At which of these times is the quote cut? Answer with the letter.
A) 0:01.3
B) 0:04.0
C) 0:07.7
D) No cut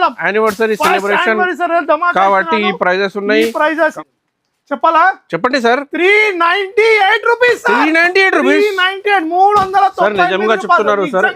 B